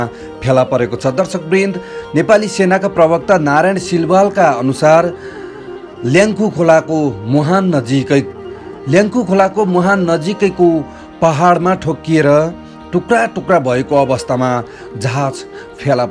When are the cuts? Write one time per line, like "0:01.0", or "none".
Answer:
none